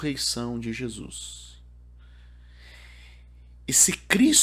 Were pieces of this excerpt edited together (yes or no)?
no